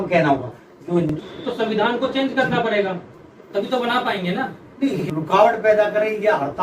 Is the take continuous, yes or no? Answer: no